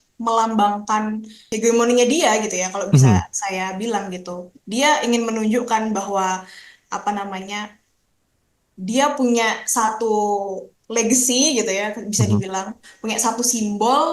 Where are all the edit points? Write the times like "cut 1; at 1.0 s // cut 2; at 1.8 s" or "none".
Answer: cut 1; at 1.4 s